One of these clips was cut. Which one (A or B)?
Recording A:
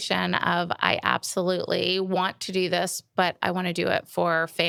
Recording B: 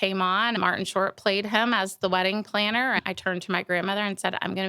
B